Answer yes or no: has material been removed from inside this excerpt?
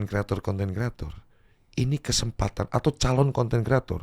no